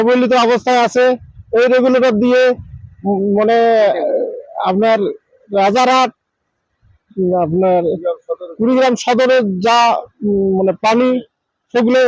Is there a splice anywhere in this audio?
no; 0 cuts

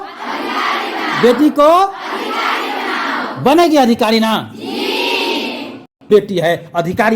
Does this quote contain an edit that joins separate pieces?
yes; 1 cut; at 6.1 s

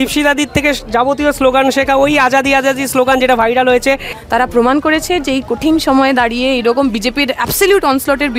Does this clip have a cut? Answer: yes; 1 cut; at 4.1 s

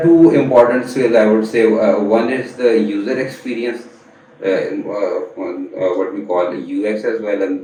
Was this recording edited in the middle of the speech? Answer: no; 0 cuts

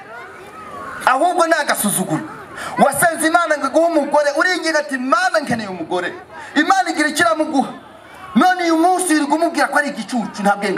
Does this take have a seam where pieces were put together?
no; 0 cuts

